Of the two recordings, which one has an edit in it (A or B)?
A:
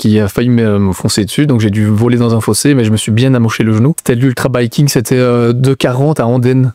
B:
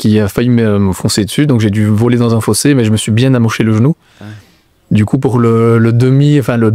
A